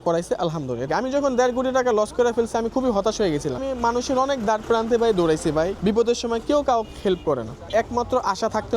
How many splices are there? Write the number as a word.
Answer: four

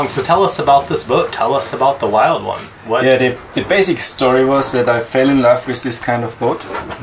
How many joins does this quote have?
one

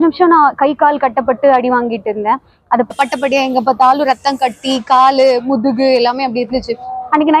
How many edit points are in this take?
one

